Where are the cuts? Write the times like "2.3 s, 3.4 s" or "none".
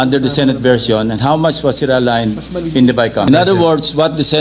3.3 s